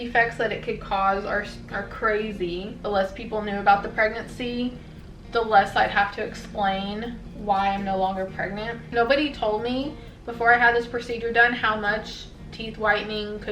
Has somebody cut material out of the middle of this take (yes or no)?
yes